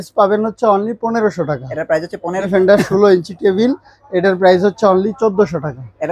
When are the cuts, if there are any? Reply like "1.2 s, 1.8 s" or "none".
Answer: 2.5 s